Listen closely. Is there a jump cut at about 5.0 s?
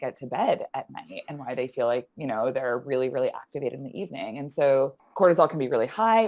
yes; 1 cut; at 5.0 s

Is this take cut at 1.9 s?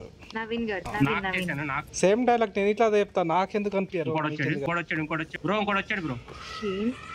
no; 0 cuts

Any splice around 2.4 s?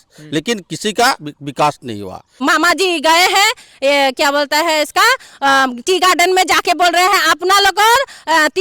yes; 1 cut; at 2.4 s

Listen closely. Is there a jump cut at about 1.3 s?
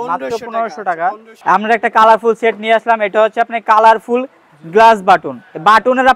yes; 1 cut; at 1.3 s

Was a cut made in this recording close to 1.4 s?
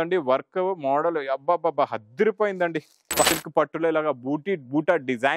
no; 1 cut; at 3.3 s

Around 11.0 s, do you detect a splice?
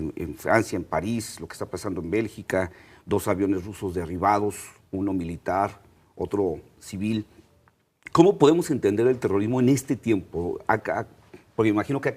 yes; 1 cut; at 11.0 s

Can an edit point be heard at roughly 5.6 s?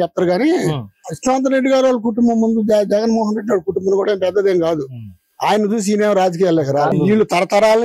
no; 1 cut; at 6.9 s

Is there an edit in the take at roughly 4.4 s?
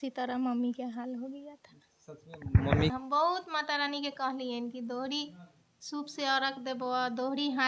no; 1 cut; at 2.9 s

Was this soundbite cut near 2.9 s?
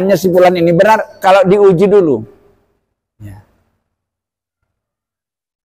no; 0 cuts

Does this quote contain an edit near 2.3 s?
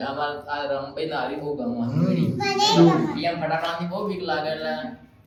no; 0 cuts

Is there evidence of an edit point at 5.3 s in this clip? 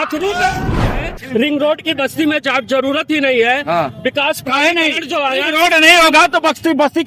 no; 1 cut; at 1.1 s

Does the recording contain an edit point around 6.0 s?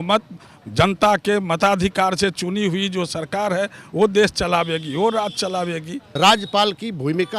yes; 1 cut; at 6.0 s

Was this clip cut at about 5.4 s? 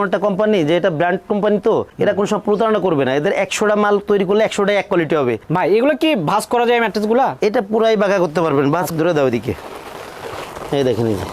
yes; 2 cuts; at 5.4 s, 8.9 s

